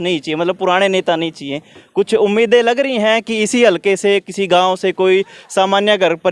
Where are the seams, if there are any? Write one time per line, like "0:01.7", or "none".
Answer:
none